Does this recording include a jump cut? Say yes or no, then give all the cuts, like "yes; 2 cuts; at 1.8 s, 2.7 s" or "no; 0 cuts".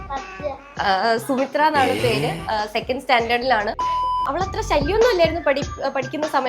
yes; 1 cut; at 4.2 s